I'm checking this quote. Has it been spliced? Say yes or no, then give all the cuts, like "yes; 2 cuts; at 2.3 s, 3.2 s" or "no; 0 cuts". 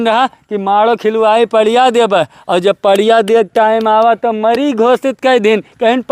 no; 0 cuts